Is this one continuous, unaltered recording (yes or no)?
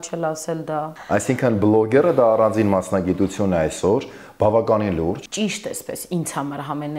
no